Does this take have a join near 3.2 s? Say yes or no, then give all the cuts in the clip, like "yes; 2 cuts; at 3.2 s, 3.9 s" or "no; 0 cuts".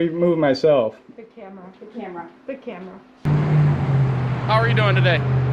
yes; 1 cut; at 3.2 s